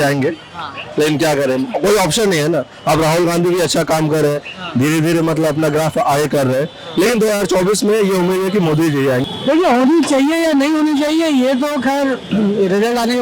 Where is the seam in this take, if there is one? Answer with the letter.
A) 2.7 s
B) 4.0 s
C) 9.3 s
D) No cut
C